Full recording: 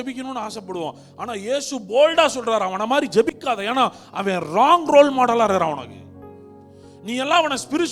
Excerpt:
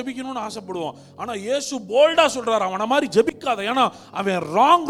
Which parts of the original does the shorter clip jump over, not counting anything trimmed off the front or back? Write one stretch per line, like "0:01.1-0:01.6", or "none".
none